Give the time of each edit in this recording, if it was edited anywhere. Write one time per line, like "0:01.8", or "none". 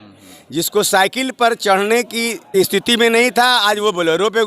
0:02.4